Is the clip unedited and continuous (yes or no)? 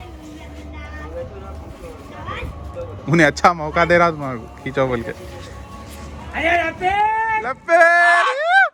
yes